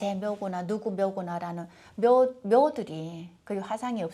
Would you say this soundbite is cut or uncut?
uncut